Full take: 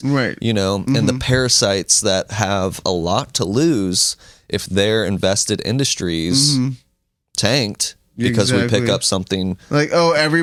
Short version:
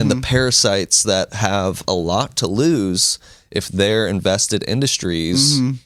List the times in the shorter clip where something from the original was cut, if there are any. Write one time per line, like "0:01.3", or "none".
none